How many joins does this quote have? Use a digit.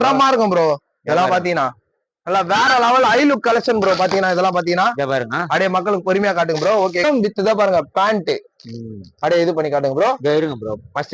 1